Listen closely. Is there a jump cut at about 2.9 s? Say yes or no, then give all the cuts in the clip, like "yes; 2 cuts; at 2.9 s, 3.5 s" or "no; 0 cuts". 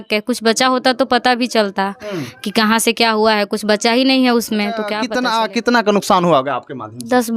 no; 1 cut; at 5.0 s